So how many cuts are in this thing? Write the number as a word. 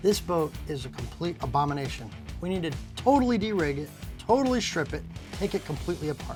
zero